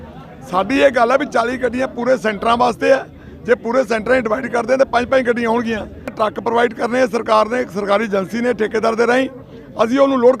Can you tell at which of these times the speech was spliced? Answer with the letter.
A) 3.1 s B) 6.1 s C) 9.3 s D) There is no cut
B